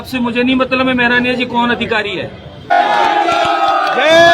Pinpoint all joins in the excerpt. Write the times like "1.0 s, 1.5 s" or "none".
2.8 s